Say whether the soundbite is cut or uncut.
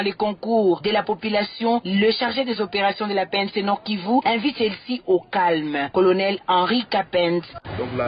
cut